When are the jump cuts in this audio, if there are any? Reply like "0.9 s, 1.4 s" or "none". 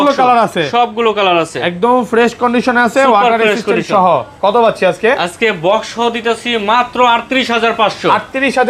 none

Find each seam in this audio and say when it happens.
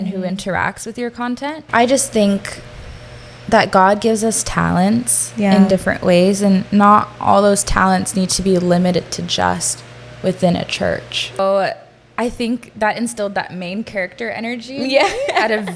1.5 s, 11.4 s

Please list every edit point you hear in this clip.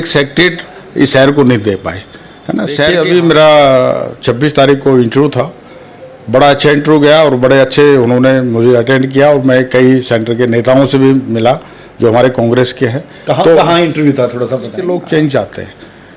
2.9 s, 14.7 s

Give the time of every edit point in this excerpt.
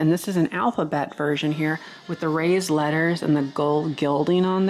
none

